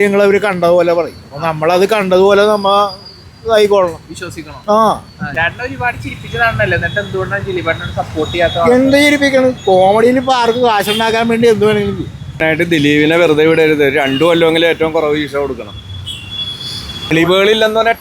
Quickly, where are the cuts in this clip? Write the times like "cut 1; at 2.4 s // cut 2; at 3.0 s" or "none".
cut 1; at 5.2 s // cut 2; at 12.4 s // cut 3; at 17.1 s